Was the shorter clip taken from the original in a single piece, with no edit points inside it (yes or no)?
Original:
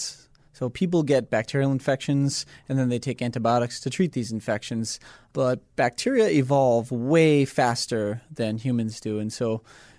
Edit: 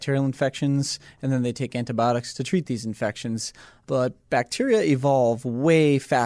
yes